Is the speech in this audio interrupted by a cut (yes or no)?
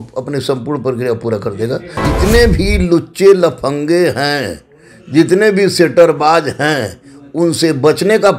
yes